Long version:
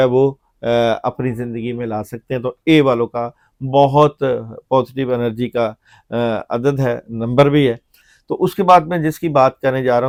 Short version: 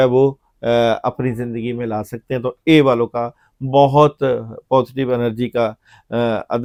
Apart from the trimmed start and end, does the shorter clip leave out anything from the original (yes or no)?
no